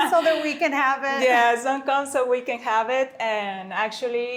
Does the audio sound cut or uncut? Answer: uncut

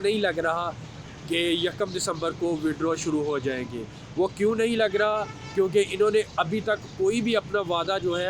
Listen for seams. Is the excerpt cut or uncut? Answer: uncut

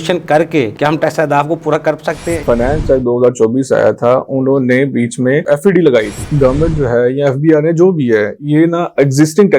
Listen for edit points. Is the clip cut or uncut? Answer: cut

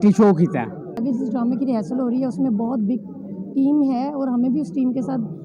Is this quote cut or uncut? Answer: cut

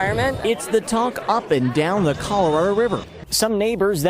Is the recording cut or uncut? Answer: cut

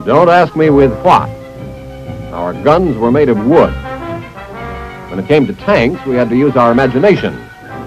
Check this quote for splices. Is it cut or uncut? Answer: uncut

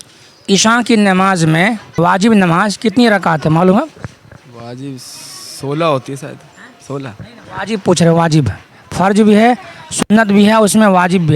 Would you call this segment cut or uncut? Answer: cut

